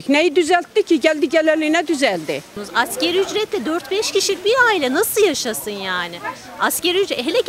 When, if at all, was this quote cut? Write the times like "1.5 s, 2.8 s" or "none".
2.4 s